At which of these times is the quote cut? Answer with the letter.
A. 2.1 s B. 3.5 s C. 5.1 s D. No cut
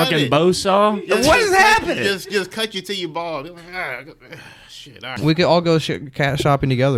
C